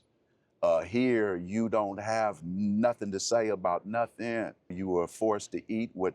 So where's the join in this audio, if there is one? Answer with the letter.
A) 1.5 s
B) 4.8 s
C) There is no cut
B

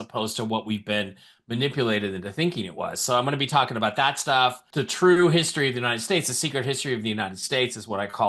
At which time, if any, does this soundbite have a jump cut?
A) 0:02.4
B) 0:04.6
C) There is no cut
B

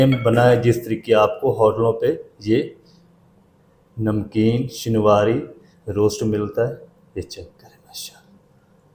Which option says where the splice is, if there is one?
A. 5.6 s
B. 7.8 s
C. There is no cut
C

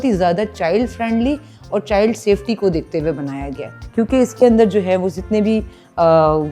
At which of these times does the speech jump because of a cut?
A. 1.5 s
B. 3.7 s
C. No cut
B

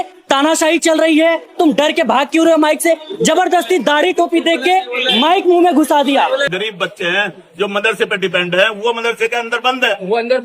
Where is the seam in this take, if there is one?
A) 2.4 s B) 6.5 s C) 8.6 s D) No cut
B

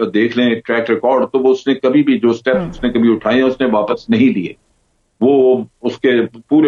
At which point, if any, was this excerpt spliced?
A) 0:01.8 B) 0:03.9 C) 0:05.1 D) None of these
D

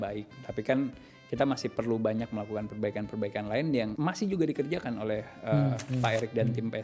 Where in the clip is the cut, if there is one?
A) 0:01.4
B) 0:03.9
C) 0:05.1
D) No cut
B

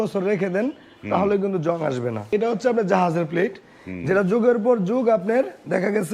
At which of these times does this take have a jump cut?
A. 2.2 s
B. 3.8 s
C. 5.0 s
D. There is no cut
A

